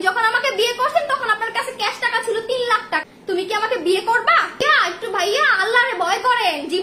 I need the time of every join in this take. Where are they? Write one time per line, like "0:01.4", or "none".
0:02.7
0:04.6